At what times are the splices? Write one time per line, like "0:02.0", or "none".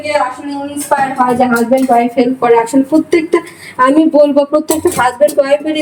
none